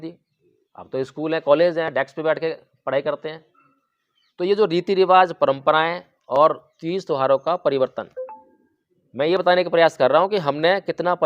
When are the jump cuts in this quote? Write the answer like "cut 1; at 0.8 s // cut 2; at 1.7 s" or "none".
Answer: none